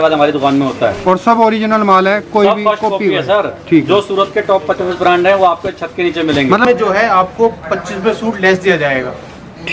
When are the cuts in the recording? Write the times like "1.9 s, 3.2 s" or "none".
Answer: 6.6 s